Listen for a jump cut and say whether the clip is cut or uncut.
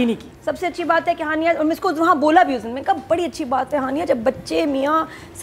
uncut